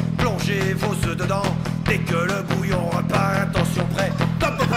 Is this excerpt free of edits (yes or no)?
yes